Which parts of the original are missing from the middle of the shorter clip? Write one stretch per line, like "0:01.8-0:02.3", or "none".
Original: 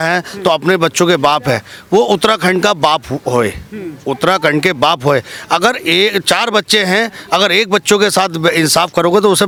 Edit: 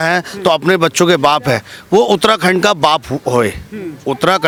none